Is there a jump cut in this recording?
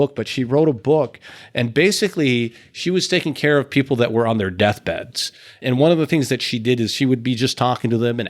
yes; 1 cut; at 5.6 s

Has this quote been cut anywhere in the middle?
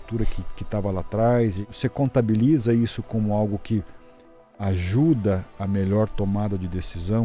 yes; 1 cut; at 1.7 s

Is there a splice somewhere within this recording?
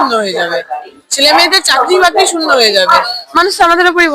yes; 1 cut; at 3.2 s

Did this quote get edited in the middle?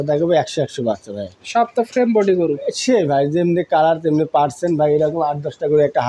no; 0 cuts

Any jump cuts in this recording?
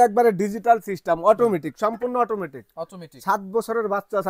no; 0 cuts

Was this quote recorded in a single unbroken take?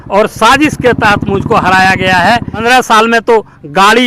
no; 1 cut; at 2.5 s

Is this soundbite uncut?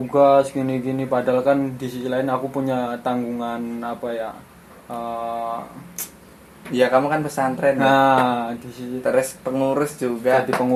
yes; 0 cuts

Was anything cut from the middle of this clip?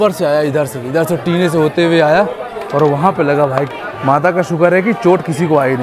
yes; 1 cut; at 3.7 s

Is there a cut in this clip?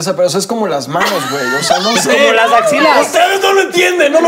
no; 0 cuts

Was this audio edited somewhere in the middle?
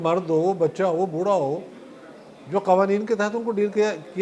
no; 0 cuts

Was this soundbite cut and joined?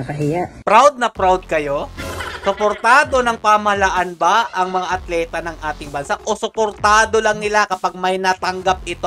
no; 0 cuts

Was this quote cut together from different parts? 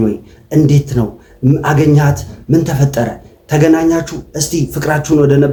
no; 0 cuts

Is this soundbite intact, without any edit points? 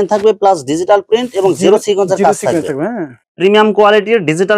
no; 1 cut; at 3.2 s

